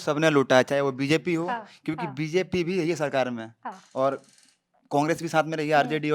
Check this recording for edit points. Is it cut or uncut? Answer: uncut